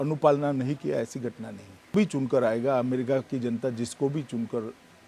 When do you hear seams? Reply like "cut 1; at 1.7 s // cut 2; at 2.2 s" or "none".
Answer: cut 1; at 1.9 s